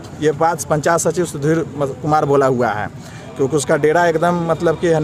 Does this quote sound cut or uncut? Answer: uncut